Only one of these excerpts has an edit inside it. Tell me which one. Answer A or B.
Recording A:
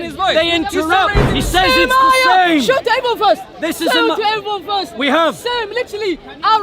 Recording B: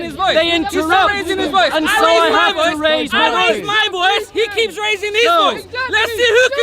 A